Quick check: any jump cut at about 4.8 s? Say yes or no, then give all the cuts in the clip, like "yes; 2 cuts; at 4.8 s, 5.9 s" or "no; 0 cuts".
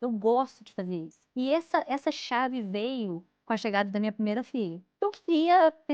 yes; 2 cuts; at 1.2 s, 4.8 s